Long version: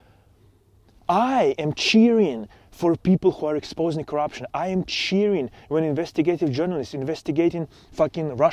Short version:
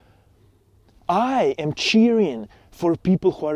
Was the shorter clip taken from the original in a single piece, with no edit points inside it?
yes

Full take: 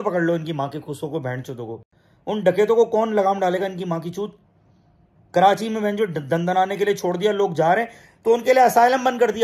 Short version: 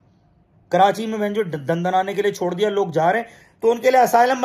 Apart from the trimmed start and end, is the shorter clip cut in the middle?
no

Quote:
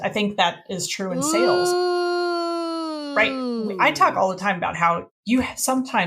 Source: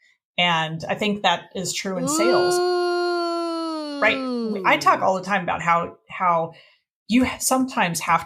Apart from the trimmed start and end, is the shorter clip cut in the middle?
yes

